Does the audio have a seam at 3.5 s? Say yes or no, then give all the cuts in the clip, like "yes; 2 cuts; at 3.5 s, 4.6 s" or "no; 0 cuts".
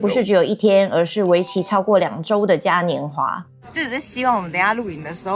yes; 1 cut; at 3.5 s